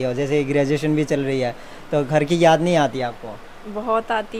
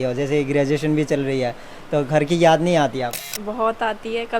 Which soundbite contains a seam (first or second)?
second